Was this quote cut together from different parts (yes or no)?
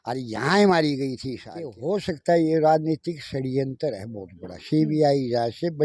yes